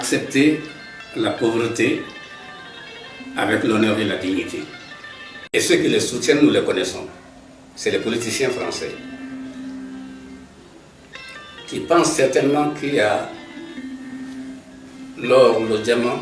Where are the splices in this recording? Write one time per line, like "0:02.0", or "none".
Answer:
0:05.3